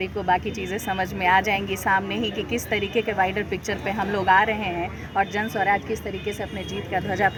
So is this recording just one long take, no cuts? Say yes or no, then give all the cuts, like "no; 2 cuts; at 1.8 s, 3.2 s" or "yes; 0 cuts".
yes; 0 cuts